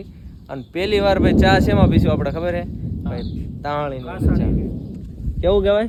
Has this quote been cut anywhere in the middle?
no; 0 cuts

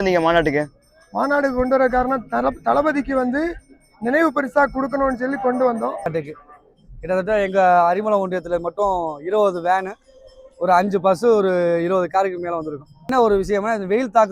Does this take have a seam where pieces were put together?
yes; 2 cuts; at 6.1 s, 13.1 s

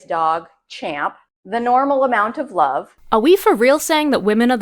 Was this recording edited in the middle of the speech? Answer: yes; 1 cut; at 2.9 s

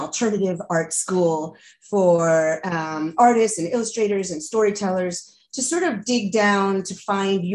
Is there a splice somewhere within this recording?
no; 0 cuts

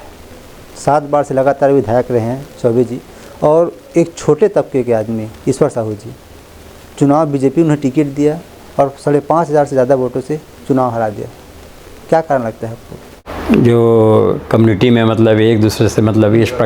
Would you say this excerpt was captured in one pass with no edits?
no; 1 cut; at 13.2 s

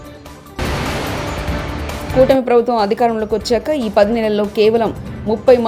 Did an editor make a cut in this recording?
no; 0 cuts

